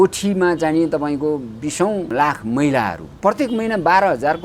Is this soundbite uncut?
no; 2 cuts; at 2.1 s, 3.1 s

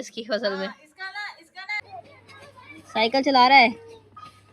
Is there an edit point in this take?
yes; 1 cut; at 1.8 s

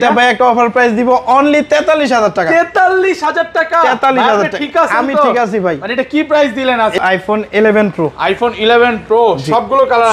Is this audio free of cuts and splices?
no; 1 cut; at 7.0 s

